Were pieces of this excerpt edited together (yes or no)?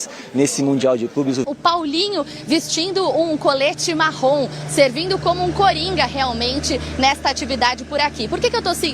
yes